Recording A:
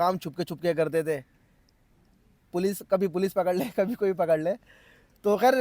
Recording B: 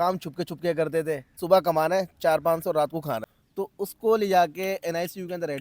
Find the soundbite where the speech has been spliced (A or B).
B